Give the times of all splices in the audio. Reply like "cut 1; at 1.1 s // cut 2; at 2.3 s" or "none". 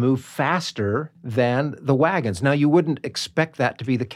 cut 1; at 1.2 s